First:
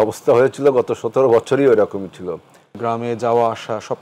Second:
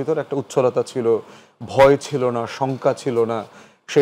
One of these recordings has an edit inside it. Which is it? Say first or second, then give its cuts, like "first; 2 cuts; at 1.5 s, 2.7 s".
first; 1 cut; at 2.8 s